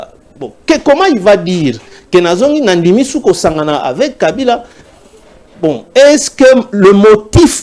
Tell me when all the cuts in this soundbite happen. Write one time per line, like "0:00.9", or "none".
none